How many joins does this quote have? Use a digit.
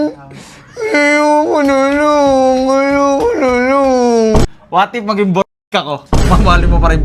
1